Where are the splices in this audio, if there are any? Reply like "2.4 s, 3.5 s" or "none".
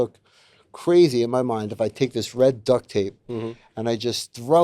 none

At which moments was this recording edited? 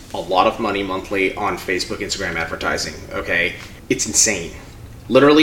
3.7 s

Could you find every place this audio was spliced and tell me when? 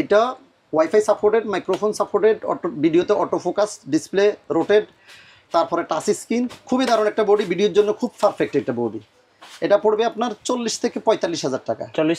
none

